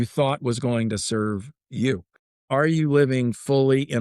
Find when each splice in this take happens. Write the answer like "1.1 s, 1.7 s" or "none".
2.4 s